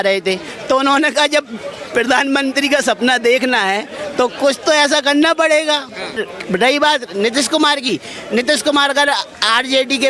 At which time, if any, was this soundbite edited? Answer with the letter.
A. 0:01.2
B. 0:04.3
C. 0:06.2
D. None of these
C